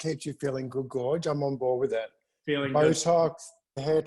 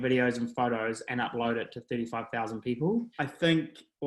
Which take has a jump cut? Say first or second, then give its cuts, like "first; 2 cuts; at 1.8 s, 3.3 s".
second; 1 cut; at 3.2 s